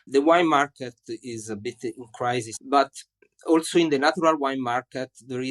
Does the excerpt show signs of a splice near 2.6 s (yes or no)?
yes